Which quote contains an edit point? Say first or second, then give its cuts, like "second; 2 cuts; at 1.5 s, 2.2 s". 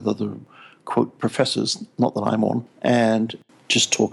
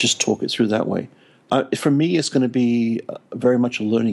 second; 1 cut; at 1.4 s